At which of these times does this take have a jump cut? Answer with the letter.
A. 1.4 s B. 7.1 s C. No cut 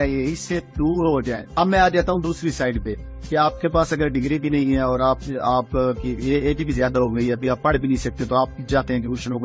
A